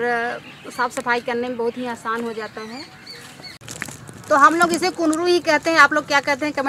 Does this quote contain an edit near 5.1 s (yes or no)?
no